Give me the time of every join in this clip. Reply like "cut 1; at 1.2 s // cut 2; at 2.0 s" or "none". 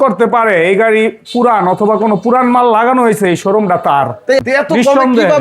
cut 1; at 4.4 s